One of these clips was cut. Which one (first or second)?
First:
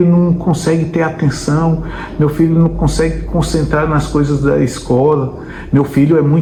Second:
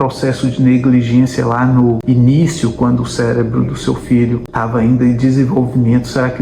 second